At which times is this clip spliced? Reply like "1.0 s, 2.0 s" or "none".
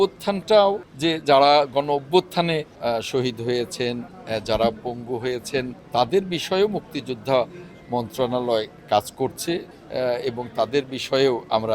0.9 s, 2.7 s, 5.8 s, 9.8 s